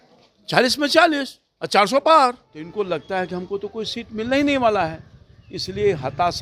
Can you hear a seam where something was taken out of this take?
yes; 1 cut; at 2.6 s

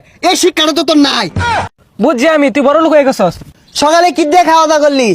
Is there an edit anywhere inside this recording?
yes; 2 cuts; at 1.7 s, 3.4 s

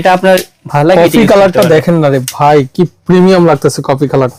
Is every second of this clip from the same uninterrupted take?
yes; 0 cuts

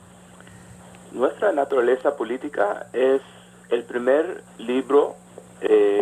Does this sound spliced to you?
yes; 1 cut; at 1.8 s

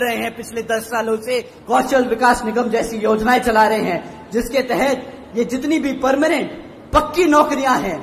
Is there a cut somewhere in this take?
yes; 1 cut; at 1.5 s

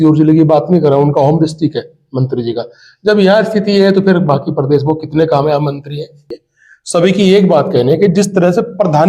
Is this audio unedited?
no; 1 cut; at 6.2 s

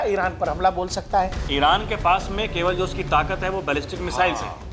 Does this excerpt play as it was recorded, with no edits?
no; 1 cut; at 1.4 s

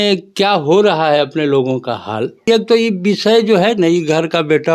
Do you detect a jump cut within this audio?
yes; 1 cut; at 2.5 s

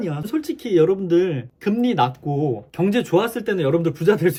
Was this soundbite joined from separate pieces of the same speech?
no; 0 cuts

